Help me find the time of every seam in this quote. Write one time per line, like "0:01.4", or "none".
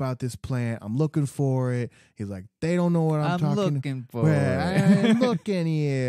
none